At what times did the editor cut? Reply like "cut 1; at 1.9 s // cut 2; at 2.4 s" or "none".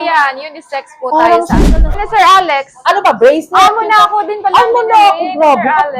cut 1; at 2.0 s